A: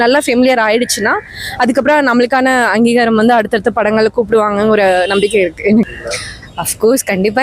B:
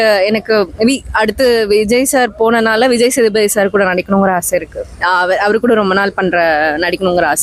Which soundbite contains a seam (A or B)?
A